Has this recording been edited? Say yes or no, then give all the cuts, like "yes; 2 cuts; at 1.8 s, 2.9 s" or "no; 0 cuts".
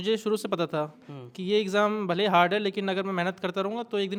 no; 0 cuts